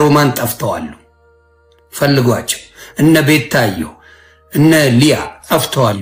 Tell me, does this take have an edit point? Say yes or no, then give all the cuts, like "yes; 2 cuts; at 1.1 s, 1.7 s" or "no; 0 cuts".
no; 0 cuts